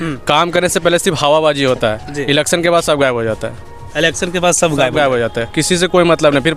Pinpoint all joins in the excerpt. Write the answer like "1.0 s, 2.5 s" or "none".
none